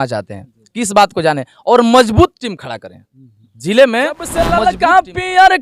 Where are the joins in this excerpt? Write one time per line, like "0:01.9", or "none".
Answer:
0:04.2

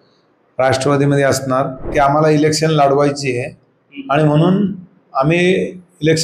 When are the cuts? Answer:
0:01.9

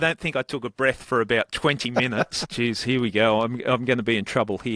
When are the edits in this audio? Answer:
0:02.5

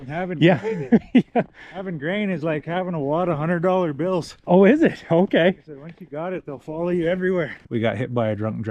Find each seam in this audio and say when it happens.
0:07.6

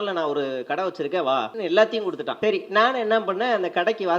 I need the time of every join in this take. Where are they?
0:01.5
0:02.3

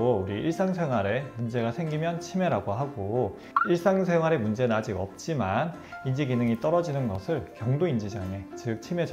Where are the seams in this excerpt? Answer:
none

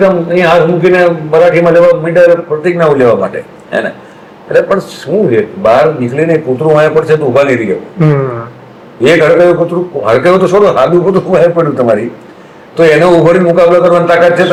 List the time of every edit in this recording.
none

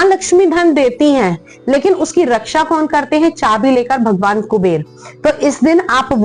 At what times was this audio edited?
none

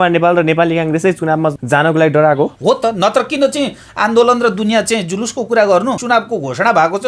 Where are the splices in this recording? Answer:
0:01.6
0:02.6
0:06.0

